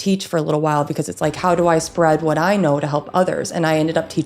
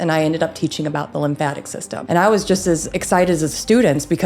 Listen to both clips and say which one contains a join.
second; 2 cuts; at 1.9 s, 2.9 s

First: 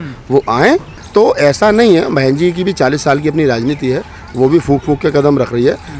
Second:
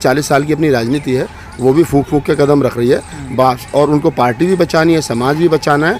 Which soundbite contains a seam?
first; 1 cut; at 0.9 s

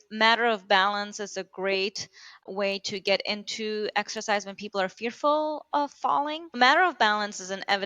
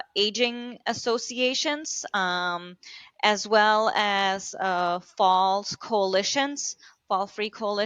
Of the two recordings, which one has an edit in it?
first; 2 cuts; at 2.4 s, 6.6 s

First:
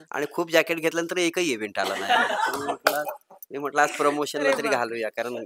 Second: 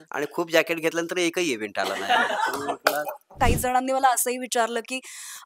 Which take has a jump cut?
second; 1 cut; at 3.4 s

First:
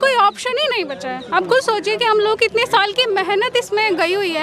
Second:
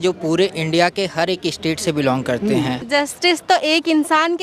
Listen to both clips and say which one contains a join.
second; 1 cut; at 2.8 s

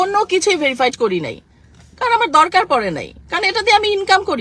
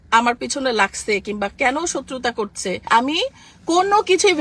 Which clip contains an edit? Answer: second; 1 cut; at 2.9 s

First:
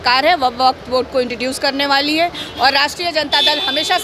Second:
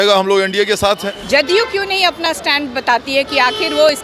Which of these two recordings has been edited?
second; 1 cut; at 1.2 s

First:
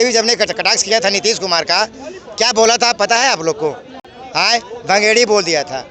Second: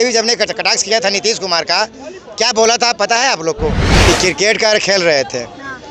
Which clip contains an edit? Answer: second; 1 cut; at 4.0 s

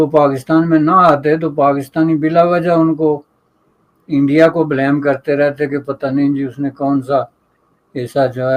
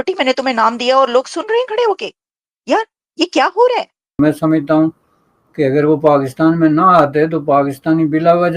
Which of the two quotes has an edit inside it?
second; 1 cut; at 4.2 s

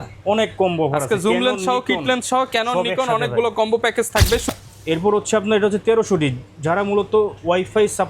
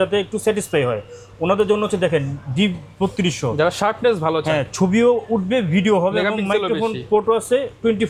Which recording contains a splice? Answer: first; 1 cut; at 4.5 s

